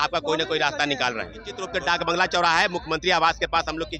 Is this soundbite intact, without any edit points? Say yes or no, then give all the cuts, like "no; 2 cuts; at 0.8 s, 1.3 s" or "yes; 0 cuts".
no; 1 cut; at 1.7 s